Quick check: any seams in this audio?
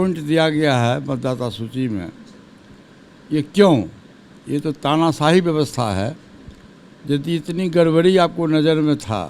no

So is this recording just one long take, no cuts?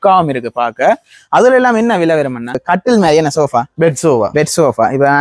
no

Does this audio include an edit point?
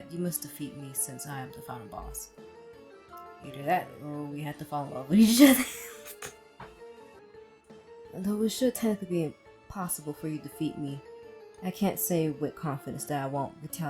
yes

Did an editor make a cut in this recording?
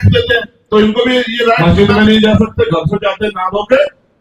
yes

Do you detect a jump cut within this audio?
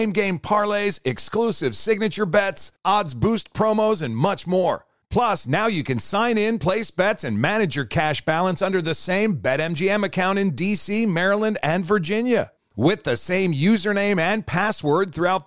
no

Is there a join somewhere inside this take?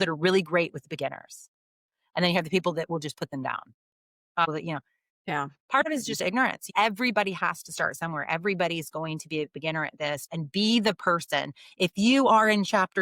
no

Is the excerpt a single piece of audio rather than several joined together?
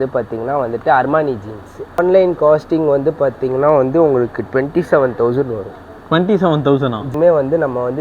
no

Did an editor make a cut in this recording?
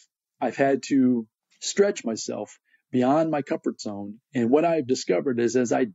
no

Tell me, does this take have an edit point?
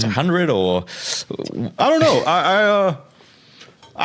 no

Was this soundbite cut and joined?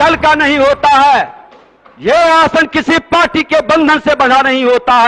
no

